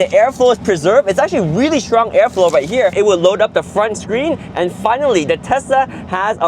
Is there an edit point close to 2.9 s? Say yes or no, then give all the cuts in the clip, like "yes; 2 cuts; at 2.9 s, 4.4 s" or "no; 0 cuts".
yes; 1 cut; at 2.9 s